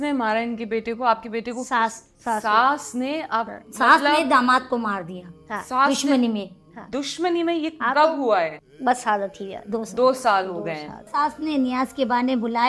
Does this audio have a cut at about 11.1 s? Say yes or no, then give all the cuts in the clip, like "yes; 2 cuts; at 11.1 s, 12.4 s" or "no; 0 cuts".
yes; 4 cuts; at 2.1 s, 3.6 s, 8.6 s, 11.1 s